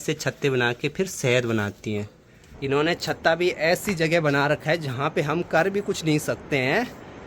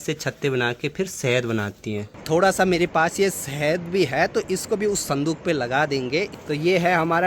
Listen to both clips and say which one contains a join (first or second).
second